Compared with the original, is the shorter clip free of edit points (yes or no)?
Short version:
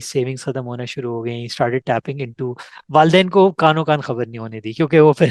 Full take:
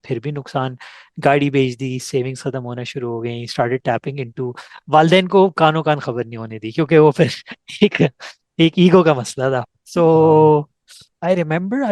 yes